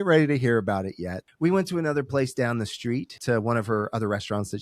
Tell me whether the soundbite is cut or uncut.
cut